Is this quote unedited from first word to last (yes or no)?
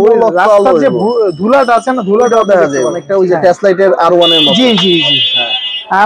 no